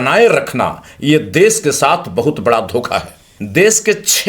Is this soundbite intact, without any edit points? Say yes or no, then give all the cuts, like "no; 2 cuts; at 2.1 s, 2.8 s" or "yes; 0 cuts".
no; 1 cut; at 3.3 s